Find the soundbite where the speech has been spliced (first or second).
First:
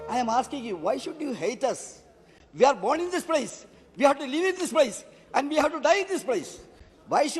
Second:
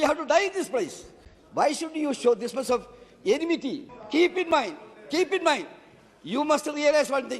second